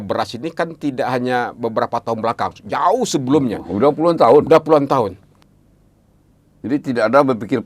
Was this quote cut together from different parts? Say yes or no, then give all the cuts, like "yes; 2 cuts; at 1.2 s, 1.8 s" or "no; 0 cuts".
yes; 1 cut; at 5.3 s